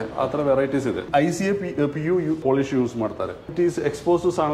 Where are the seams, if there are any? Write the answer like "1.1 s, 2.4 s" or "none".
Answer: 1.0 s